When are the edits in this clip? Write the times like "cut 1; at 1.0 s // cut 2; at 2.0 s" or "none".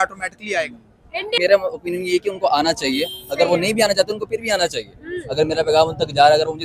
cut 1; at 1.3 s